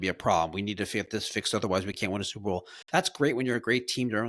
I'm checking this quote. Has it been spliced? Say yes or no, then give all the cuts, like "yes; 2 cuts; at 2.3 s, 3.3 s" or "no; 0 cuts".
no; 0 cuts